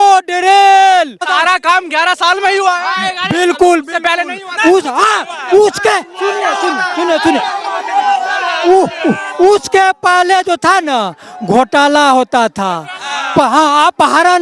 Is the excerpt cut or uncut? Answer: cut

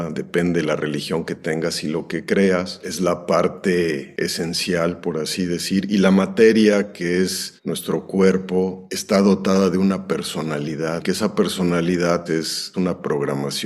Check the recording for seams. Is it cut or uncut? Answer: cut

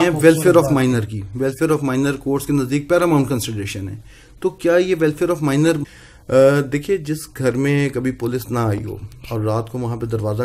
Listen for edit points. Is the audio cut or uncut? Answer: cut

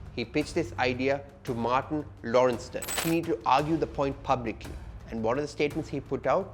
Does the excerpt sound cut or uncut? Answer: cut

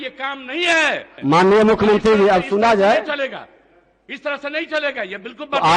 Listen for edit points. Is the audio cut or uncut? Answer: cut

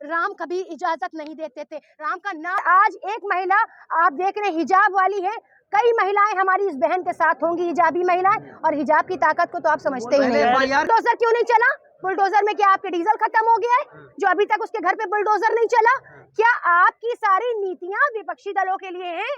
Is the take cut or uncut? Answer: cut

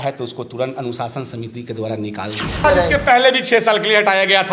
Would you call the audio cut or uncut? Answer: cut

